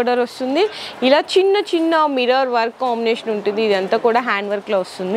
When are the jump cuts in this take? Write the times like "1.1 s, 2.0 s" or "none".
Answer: none